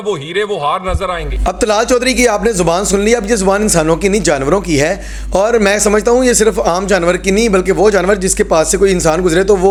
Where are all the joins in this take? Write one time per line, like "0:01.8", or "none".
none